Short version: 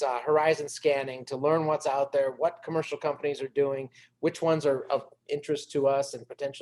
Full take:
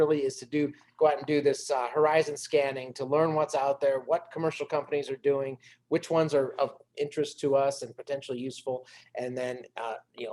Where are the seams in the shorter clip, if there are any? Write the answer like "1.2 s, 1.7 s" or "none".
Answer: none